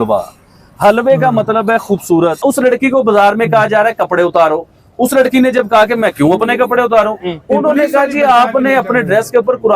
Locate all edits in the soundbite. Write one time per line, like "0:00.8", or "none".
0:02.4

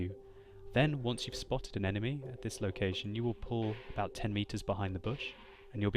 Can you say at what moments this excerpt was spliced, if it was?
0:03.8

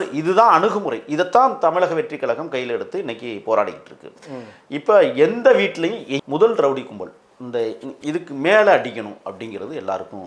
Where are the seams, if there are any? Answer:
0:06.2

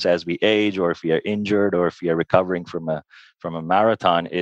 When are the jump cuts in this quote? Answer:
none

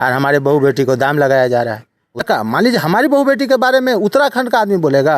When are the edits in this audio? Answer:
0:02.2

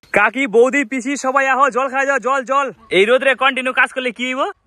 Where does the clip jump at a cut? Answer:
0:02.8

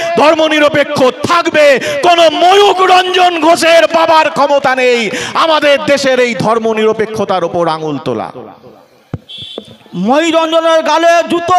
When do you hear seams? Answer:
none

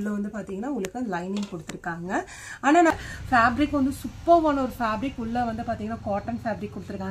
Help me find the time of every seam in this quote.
0:02.9

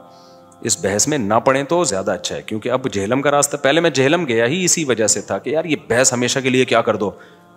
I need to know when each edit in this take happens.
none

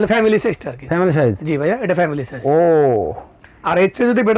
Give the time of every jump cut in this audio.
none

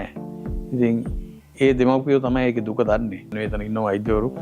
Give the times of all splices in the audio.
0:03.4

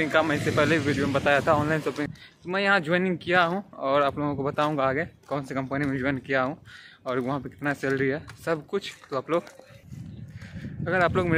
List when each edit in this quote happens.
0:02.1

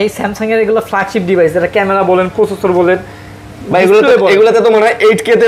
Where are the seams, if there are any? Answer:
none

